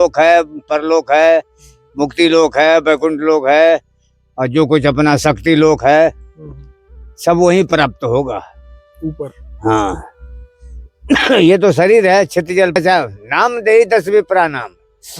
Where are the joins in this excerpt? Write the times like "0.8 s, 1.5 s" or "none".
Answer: 12.7 s